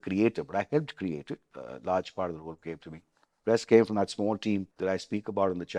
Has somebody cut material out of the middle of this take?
yes; 1 cut; at 4.7 s

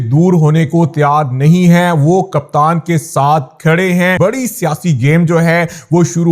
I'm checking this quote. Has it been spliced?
yes; 1 cut; at 4.2 s

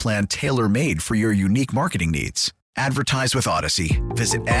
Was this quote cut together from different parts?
no; 0 cuts

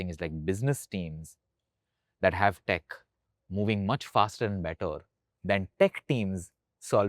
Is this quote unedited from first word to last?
yes; 0 cuts

